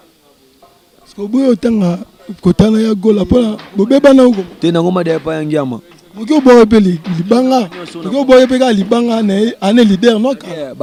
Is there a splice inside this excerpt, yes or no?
no